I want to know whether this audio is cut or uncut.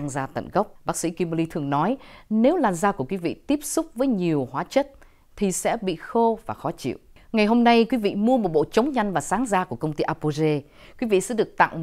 uncut